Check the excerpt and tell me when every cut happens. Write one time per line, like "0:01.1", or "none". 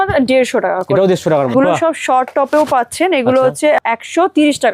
0:01.5
0:03.8